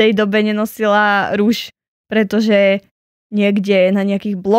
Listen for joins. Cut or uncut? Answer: uncut